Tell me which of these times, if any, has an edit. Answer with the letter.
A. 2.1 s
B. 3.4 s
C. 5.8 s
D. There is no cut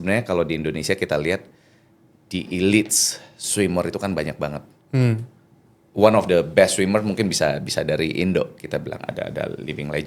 C